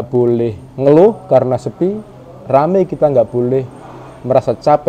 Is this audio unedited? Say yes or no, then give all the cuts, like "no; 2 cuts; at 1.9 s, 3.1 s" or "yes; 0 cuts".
yes; 0 cuts